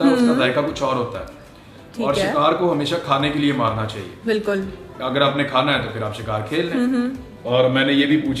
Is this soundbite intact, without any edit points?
no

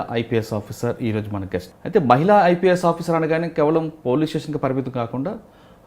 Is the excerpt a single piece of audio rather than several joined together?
no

